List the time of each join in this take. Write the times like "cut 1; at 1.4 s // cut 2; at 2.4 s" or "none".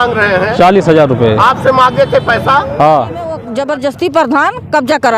cut 1; at 3.4 s

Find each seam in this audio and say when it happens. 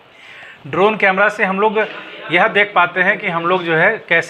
none

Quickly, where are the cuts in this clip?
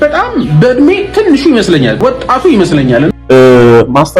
cut 1; at 2.0 s // cut 2; at 3.1 s

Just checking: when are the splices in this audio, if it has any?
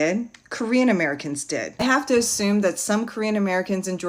cut 1; at 1.8 s

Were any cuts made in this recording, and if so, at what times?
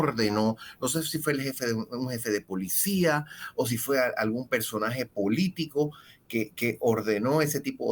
none

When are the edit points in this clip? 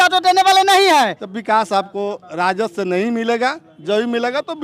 cut 1; at 1.1 s

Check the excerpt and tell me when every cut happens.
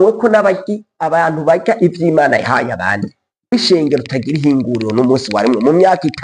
cut 1; at 3.5 s

